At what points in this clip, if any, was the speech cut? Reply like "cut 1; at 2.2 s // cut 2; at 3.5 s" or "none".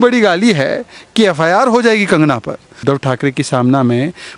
cut 1; at 2.8 s